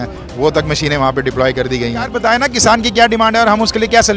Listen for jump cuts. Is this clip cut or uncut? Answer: cut